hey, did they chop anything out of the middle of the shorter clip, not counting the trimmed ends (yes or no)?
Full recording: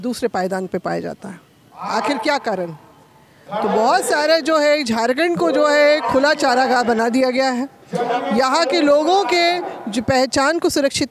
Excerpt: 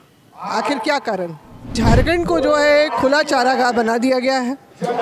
yes